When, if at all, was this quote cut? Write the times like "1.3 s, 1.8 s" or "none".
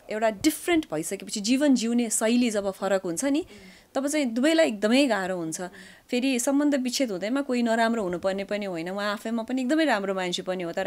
none